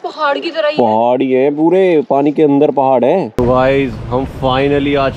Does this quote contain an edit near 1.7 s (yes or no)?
no